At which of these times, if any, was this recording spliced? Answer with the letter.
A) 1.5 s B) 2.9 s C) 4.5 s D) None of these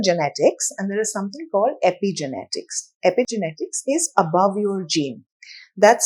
D